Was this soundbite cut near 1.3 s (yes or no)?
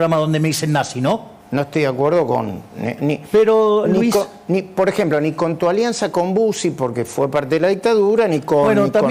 yes